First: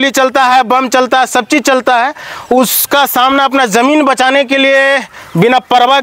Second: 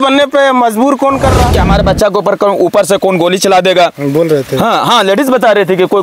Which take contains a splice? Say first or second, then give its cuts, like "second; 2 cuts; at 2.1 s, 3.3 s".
second; 1 cut; at 1.6 s